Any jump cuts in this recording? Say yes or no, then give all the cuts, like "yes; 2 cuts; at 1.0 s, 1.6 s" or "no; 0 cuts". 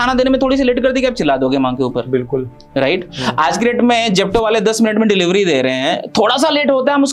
no; 0 cuts